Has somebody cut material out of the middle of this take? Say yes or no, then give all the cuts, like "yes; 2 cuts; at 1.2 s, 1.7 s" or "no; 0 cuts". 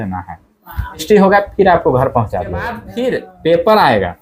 yes; 2 cuts; at 1.0 s, 2.9 s